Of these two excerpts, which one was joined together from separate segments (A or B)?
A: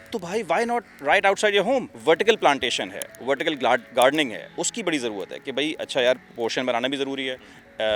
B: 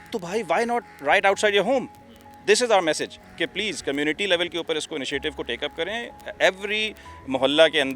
A